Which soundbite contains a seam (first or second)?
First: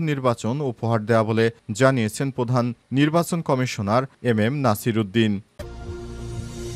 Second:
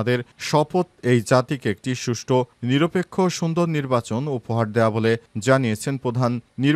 first